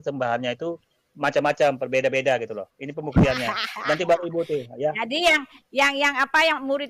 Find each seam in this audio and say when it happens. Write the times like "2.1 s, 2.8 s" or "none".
none